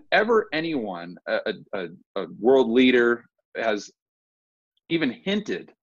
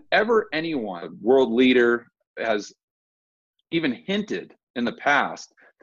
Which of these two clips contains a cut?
second; 1 cut; at 1.1 s

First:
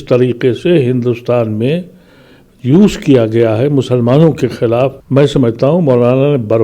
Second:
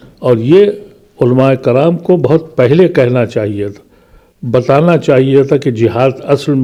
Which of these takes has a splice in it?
first; 1 cut; at 5.0 s

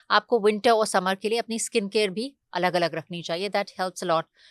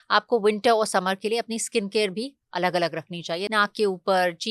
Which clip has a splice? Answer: second; 1 cut; at 3.4 s

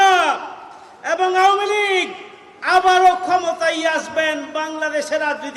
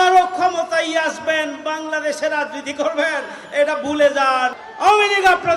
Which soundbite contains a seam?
second; 1 cut; at 4.6 s

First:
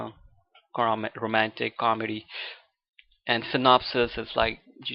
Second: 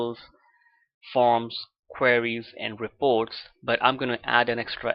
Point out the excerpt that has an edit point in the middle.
first; 1 cut; at 1.9 s

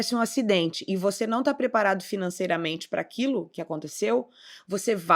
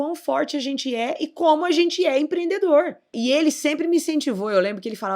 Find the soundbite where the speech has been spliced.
second; 1 cut; at 3.1 s

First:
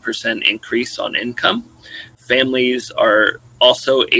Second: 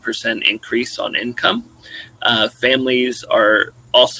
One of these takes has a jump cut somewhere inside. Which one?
first; 1 cut; at 2.2 s

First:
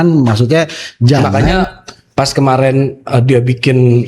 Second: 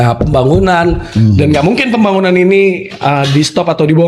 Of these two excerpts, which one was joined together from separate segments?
first; 1 cut; at 1.6 s

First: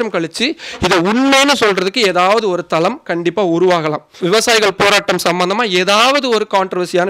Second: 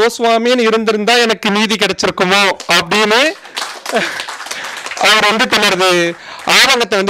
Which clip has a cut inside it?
first; 1 cut; at 4.1 s

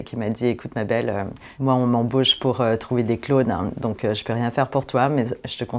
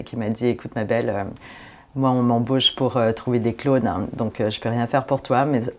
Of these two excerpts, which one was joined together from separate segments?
first; 1 cut; at 1.4 s

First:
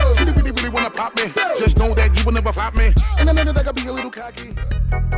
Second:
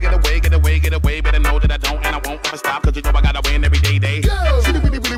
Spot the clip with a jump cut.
first; 1 cut; at 4.3 s

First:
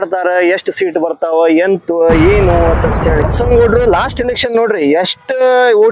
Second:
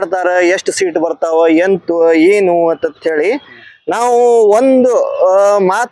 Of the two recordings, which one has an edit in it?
first; 1 cut; at 3.2 s

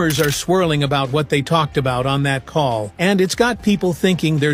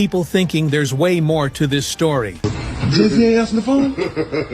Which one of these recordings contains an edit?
second; 1 cut; at 2.3 s

